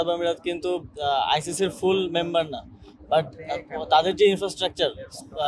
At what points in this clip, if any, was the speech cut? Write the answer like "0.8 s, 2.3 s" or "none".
none